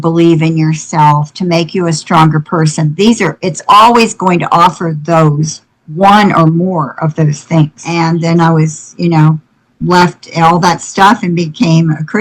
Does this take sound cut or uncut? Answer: cut